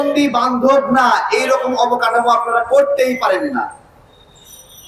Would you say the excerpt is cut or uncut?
uncut